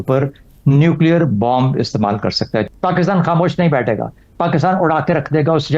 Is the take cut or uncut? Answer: cut